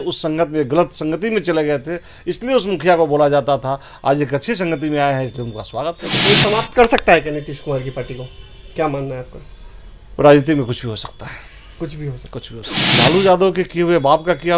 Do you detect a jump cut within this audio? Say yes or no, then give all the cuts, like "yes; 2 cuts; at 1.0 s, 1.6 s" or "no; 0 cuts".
yes; 2 cuts; at 6.2 s, 12.8 s